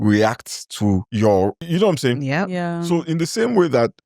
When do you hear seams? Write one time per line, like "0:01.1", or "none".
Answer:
0:01.1
0:01.6